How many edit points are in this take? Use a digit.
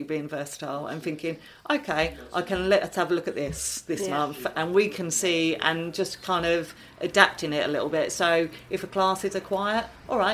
0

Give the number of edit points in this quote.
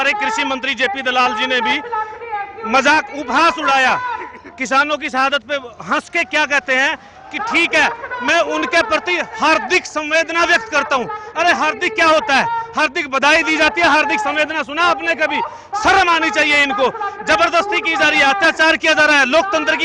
0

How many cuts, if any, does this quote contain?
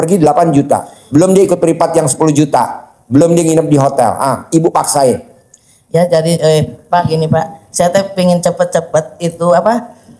0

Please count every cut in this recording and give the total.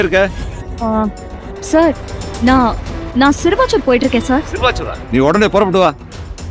1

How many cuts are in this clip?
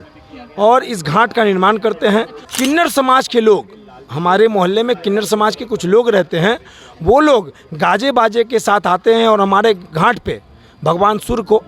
1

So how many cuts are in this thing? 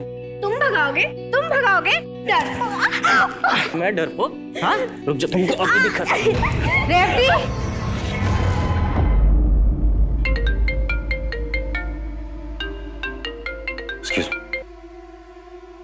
1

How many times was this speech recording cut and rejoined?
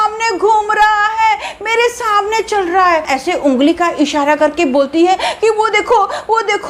1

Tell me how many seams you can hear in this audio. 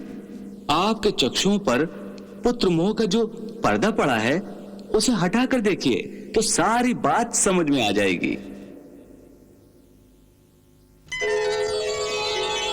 0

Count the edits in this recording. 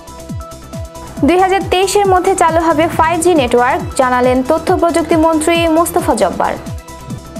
2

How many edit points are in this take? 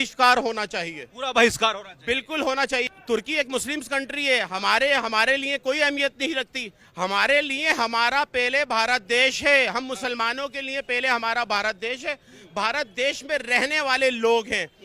1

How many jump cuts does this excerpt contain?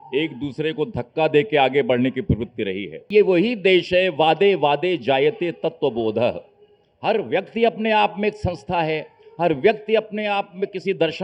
1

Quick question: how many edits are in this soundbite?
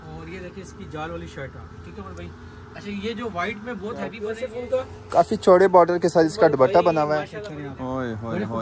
2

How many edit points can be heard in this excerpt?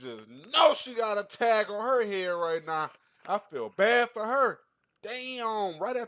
0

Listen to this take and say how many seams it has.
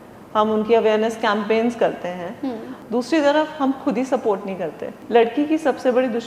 2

